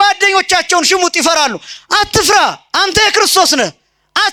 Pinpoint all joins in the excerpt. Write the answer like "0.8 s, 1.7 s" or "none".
none

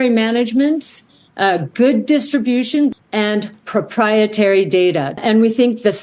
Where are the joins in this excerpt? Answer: 2.9 s, 5.1 s

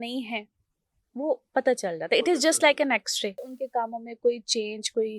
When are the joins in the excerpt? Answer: 3.5 s

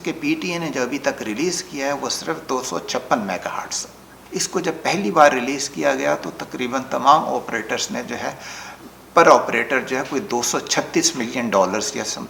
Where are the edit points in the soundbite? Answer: none

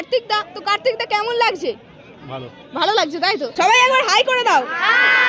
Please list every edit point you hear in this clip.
3.5 s

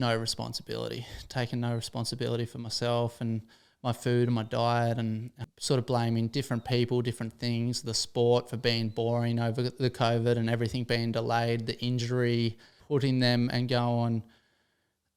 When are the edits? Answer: 5.3 s, 12.7 s

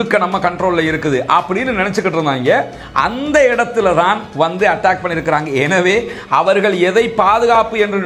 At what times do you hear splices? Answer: none

